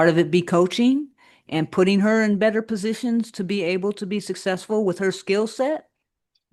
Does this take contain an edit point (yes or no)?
no